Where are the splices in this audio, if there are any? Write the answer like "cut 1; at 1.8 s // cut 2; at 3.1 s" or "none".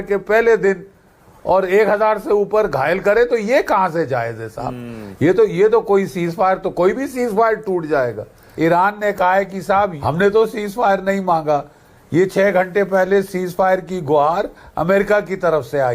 cut 1; at 8.4 s // cut 2; at 10.0 s